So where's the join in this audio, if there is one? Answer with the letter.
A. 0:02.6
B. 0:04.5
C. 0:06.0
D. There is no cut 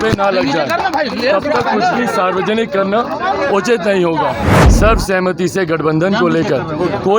B